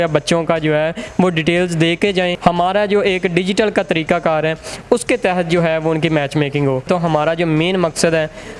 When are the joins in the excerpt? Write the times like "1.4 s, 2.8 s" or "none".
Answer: 2.4 s, 6.9 s